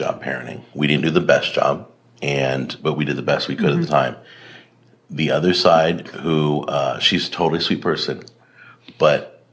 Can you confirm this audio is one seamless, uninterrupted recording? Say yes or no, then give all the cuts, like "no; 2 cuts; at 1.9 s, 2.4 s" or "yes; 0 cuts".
yes; 0 cuts